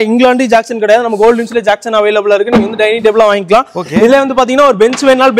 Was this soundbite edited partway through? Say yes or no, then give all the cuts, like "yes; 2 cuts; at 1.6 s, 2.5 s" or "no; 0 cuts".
no; 0 cuts